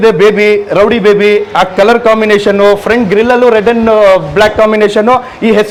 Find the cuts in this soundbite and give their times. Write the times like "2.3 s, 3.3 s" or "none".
none